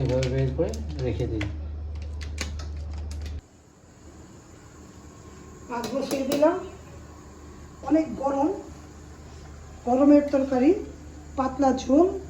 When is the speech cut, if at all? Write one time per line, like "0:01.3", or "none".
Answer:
0:03.4